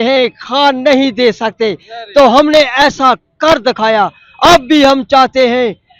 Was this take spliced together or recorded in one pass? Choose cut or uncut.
uncut